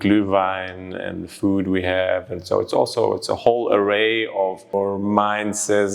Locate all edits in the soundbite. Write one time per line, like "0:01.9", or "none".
0:04.7